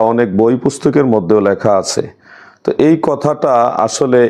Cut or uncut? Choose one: uncut